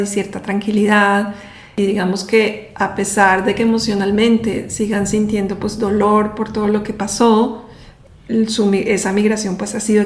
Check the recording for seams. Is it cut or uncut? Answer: uncut